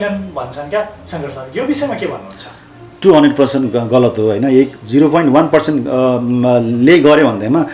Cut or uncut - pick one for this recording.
uncut